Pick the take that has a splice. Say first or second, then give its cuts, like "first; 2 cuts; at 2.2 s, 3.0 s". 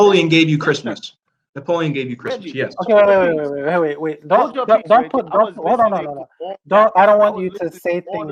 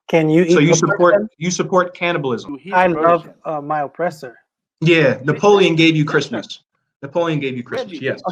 second; 1 cut; at 2.5 s